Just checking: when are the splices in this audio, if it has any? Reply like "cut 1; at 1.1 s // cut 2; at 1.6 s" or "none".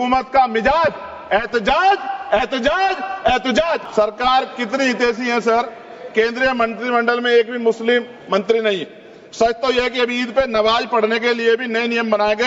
cut 1; at 3.8 s